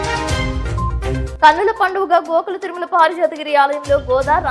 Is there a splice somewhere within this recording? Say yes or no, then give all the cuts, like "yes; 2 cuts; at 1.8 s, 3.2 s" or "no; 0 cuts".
no; 0 cuts